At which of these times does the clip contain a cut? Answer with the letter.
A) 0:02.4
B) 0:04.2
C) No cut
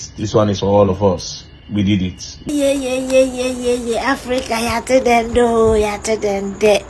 A